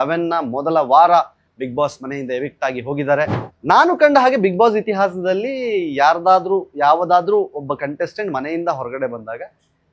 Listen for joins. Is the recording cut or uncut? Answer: cut